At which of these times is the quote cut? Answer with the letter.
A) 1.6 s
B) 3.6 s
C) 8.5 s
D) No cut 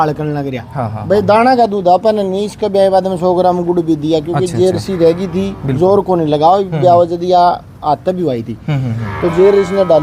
D